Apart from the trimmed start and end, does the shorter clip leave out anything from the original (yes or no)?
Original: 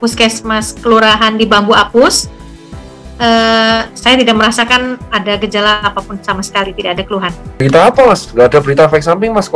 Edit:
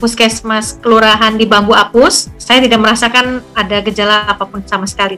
yes